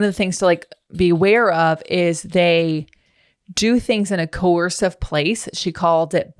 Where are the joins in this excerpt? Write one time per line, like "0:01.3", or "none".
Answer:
none